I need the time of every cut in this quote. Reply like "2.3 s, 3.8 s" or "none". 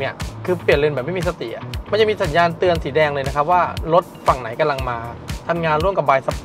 none

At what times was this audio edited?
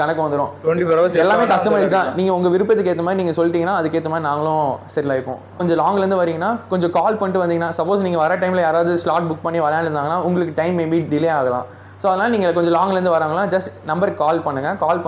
none

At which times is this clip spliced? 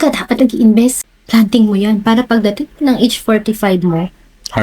1.0 s

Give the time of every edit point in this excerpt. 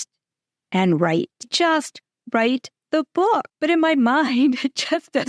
1.5 s, 3.5 s

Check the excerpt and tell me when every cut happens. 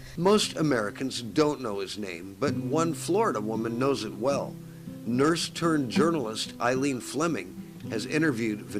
0.9 s

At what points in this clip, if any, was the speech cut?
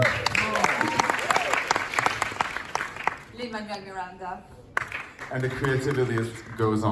none

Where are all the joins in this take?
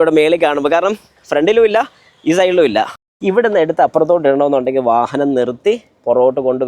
3.1 s

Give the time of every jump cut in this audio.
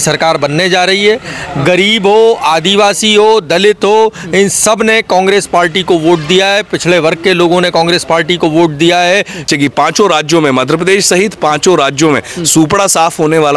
9.5 s

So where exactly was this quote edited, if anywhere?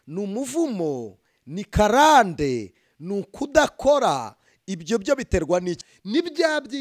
5.8 s

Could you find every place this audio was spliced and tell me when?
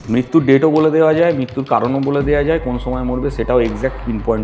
none

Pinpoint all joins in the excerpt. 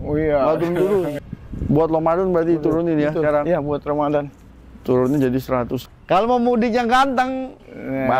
1.2 s, 5.8 s

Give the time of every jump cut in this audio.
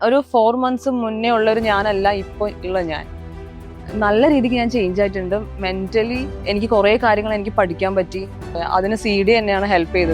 6.3 s, 8.6 s

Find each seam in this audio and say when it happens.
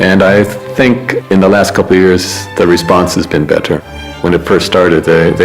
1.1 s, 4.2 s

